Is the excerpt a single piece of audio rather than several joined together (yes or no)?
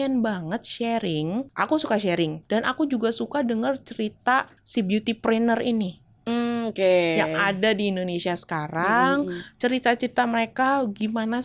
no